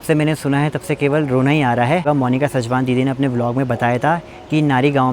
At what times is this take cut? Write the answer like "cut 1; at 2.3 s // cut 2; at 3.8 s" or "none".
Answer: cut 1; at 2.0 s